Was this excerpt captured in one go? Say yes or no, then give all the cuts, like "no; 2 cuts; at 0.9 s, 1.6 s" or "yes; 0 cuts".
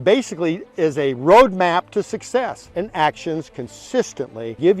no; 1 cut; at 2.7 s